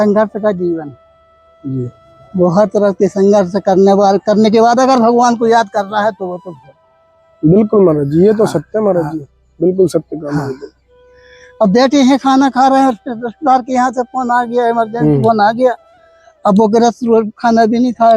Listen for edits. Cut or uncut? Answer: uncut